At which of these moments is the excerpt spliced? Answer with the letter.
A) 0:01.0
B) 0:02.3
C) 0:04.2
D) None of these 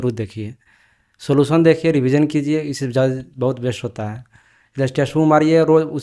D